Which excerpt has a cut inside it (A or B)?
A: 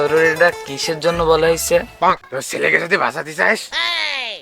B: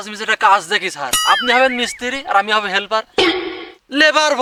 A